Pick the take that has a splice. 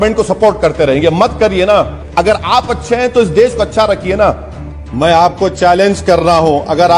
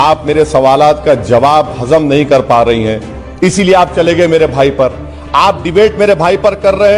first; 2 cuts; at 2.0 s, 4.8 s

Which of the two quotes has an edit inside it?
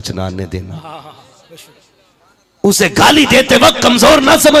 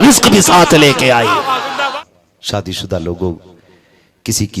second; 1 cut; at 2.0 s

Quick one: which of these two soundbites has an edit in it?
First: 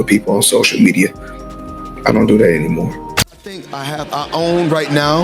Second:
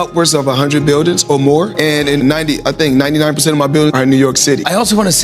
first; 1 cut; at 3.0 s

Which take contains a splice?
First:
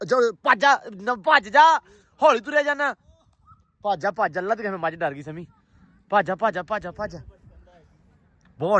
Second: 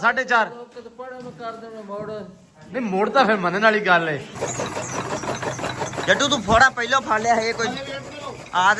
second; 1 cut; at 4.4 s

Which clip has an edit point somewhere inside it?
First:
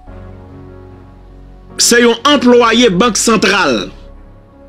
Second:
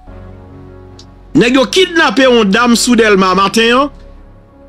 second; 2 cuts; at 1.3 s, 3.9 s

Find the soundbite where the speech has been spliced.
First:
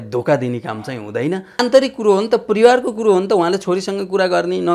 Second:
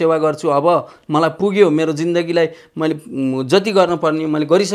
first; 1 cut; at 1.6 s

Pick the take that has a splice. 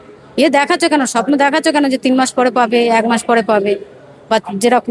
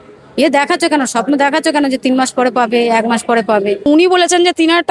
second; 1 cut; at 3.9 s

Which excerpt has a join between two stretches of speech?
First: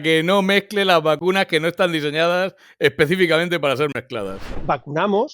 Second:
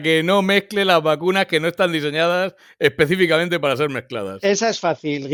first; 1 cut; at 4.3 s

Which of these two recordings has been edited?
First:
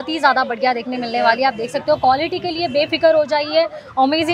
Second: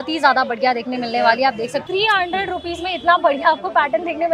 second; 1 cut; at 1.8 s

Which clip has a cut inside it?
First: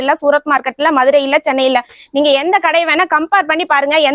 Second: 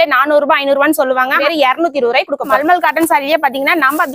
second; 2 cuts; at 1.4 s, 2.6 s

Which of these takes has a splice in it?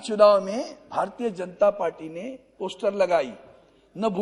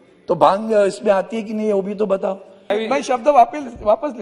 second; 1 cut; at 2.7 s

